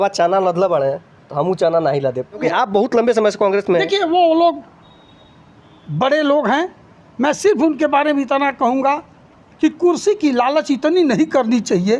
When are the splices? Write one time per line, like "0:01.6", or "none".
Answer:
0:02.4